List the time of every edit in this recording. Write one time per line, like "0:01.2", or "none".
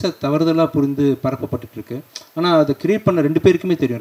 none